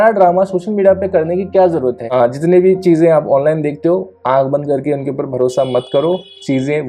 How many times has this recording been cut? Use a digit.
1